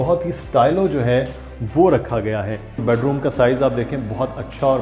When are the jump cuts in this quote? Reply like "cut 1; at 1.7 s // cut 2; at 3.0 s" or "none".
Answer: cut 1; at 2.8 s